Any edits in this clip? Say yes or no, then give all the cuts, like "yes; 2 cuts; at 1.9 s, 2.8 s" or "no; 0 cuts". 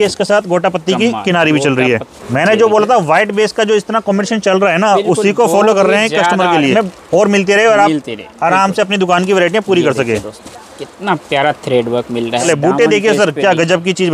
yes; 3 cuts; at 2.1 s, 6.7 s, 12.4 s